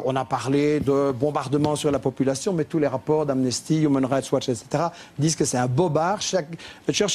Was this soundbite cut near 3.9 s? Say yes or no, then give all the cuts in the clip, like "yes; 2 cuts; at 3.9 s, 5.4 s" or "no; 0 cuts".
yes; 1 cut; at 3.9 s